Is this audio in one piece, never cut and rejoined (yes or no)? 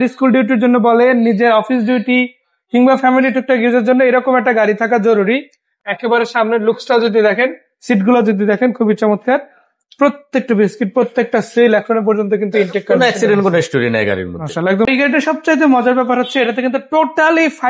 no